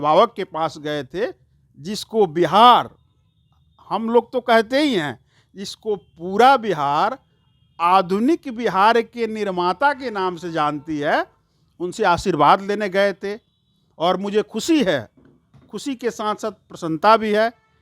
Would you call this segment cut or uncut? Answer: uncut